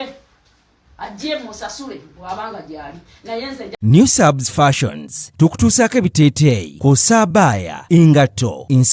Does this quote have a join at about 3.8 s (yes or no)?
yes